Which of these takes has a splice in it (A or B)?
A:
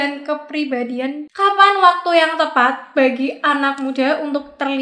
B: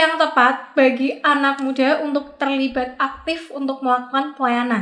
A